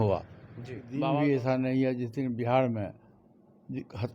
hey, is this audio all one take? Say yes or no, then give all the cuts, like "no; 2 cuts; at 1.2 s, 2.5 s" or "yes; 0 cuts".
no; 1 cut; at 0.9 s